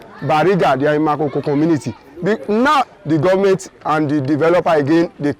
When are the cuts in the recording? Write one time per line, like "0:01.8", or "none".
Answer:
0:02.9